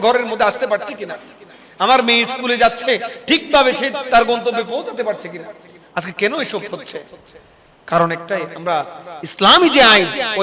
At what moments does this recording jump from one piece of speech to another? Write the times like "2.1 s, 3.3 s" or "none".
none